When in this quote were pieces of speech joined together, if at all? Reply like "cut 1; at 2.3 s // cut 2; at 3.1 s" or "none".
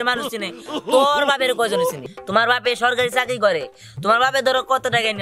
cut 1; at 2.0 s